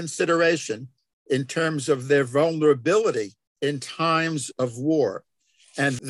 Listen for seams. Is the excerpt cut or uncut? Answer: cut